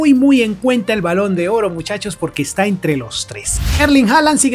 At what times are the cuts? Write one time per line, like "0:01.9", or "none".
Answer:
0:03.6